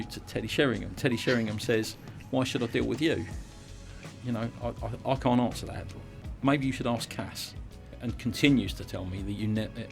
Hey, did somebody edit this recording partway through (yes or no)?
yes